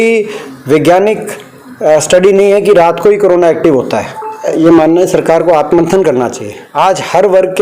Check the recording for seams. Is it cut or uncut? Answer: cut